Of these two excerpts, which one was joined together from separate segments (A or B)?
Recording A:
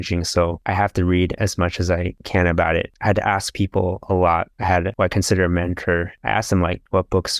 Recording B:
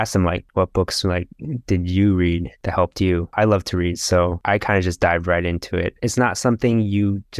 B